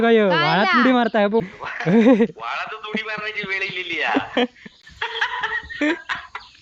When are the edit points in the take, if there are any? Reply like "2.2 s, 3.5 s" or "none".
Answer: 4.6 s